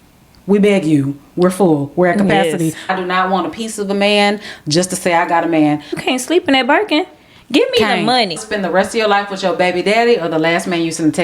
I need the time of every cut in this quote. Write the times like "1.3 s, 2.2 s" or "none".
2.9 s, 6.0 s, 8.4 s